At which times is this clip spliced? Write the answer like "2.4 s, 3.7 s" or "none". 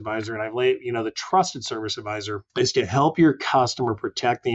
2.4 s